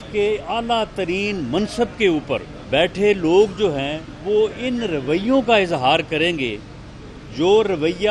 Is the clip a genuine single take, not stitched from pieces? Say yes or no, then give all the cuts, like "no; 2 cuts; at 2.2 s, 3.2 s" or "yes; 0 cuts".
no; 2 cuts; at 2.5 s, 4.1 s